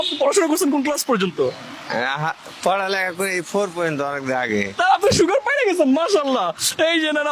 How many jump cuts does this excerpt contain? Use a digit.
0